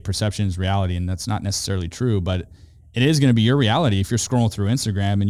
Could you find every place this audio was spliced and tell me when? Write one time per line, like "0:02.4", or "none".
none